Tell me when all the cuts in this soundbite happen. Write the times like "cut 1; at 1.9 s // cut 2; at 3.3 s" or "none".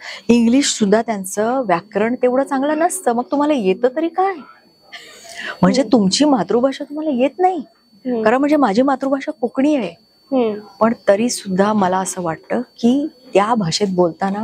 none